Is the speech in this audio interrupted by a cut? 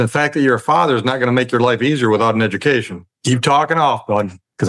no; 0 cuts

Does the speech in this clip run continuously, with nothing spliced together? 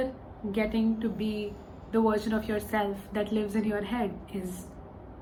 yes; 0 cuts

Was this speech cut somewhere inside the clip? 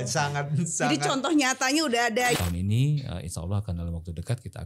yes; 1 cut; at 2.4 s

